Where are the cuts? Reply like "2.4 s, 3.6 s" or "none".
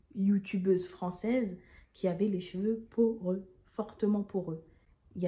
none